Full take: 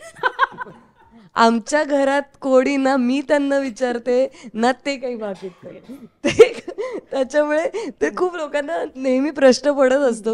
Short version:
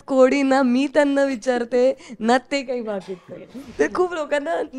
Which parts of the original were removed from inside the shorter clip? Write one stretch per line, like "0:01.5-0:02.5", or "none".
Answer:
0:06.0-0:07.9